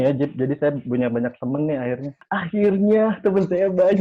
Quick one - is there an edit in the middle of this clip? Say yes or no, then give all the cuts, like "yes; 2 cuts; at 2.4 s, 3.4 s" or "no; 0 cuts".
yes; 1 cut; at 2.1 s